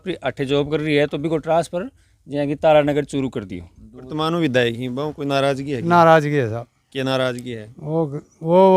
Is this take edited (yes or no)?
yes